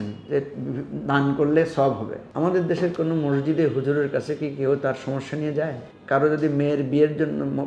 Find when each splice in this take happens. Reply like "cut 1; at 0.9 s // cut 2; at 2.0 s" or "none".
cut 1; at 2.2 s // cut 2; at 5.9 s